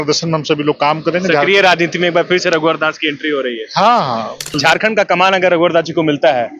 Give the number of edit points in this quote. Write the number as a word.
one